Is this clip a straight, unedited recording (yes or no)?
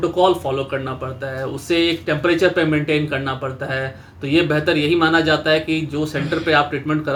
yes